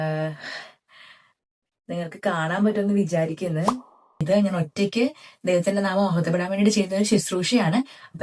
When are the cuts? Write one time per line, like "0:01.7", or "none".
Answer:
0:04.1